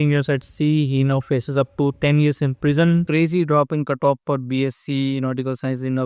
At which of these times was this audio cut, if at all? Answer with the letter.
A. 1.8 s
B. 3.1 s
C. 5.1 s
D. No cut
B